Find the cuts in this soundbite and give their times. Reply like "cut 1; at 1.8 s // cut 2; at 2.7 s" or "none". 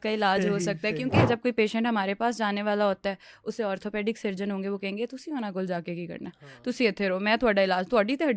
cut 1; at 1.2 s